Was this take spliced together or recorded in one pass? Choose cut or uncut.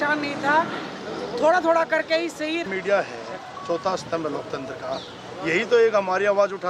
cut